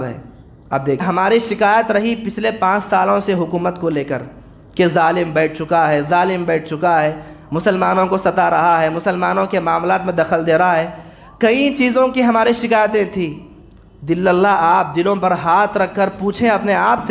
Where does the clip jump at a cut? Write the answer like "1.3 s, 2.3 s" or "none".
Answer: 1.0 s